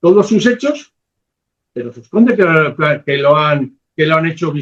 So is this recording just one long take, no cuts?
yes; 0 cuts

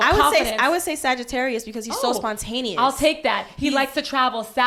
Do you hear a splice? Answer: no; 0 cuts

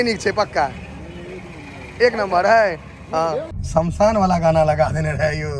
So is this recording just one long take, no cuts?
no; 1 cut; at 3.5 s

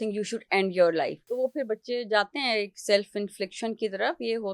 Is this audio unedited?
no; 1 cut; at 1.3 s

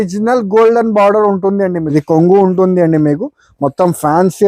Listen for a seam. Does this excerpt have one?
yes; 1 cut; at 1.8 s

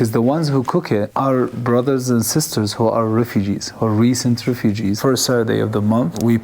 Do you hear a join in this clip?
yes; 1 cut; at 5.0 s

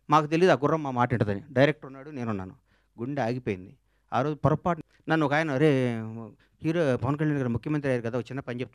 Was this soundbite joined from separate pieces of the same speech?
yes; 1 cut; at 4.8 s

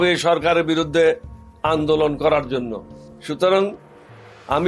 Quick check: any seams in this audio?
no; 0 cuts

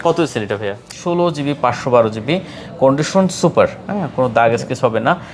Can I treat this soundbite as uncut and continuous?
no; 1 cut; at 0.9 s

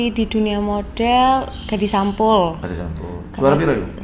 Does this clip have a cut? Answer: no; 0 cuts

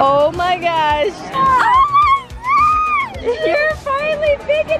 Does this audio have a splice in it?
yes; 1 cut; at 1.2 s

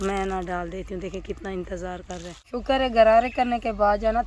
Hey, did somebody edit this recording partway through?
yes; 1 cut; at 2.4 s

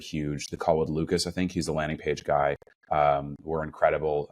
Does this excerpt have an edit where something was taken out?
no; 0 cuts

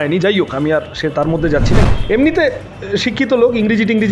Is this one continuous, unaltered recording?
no; 1 cut; at 1.8 s

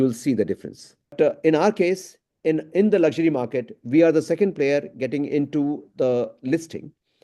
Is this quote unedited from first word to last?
no; 1 cut; at 1.1 s

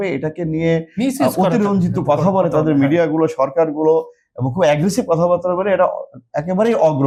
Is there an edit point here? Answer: no; 0 cuts

